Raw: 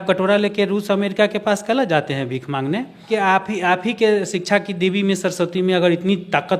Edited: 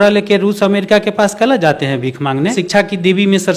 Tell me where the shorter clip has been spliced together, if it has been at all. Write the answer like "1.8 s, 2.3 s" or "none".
2.6 s